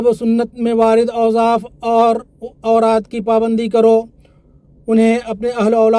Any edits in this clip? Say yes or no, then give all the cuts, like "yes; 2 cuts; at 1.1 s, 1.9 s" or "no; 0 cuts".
no; 0 cuts